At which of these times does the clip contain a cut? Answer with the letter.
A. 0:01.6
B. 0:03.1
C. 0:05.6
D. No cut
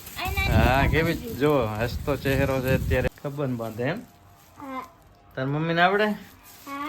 B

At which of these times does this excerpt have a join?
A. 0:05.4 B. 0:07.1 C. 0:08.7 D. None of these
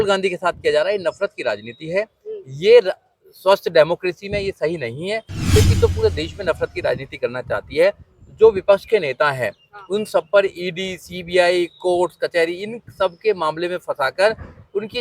A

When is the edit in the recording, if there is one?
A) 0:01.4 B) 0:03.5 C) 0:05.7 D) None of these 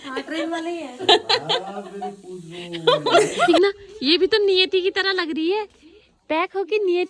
B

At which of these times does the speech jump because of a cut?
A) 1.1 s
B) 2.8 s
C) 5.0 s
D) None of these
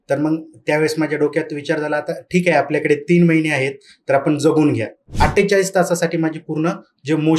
C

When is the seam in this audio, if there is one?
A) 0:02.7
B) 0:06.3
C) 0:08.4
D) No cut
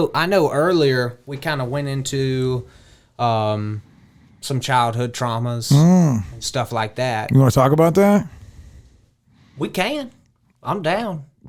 D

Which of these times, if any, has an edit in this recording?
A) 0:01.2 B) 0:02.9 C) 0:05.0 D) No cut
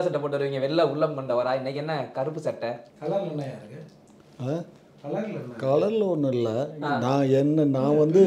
B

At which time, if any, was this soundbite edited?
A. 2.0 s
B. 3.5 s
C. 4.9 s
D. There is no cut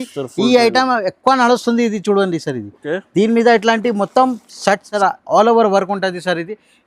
C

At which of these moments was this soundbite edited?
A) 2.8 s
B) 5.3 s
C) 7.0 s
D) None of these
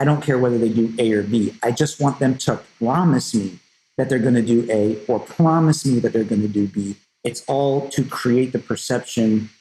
C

